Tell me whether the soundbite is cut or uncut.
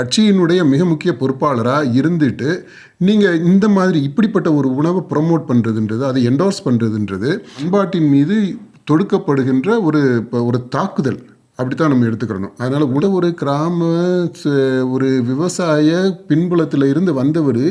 cut